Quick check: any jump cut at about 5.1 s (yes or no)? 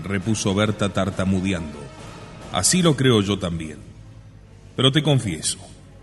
yes